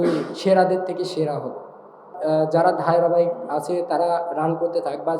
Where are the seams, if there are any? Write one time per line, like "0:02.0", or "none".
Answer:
0:02.1